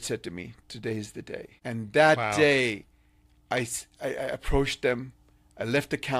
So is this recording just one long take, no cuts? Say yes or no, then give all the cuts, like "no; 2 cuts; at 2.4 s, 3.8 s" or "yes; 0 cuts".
no; 1 cut; at 1.5 s